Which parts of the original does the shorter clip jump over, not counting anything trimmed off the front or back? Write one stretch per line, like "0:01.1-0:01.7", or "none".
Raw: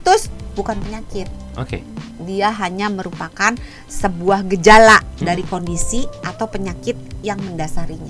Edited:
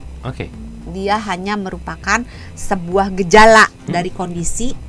none